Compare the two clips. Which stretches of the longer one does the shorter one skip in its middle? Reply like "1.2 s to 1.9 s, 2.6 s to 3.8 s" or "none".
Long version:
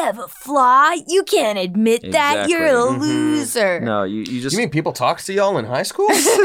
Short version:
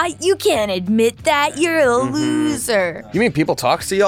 3.9 s to 4.4 s